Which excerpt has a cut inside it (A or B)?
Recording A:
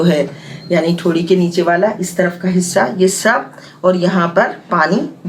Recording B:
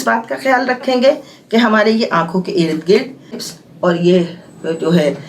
B